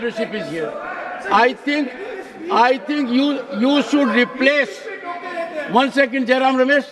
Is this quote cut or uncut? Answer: uncut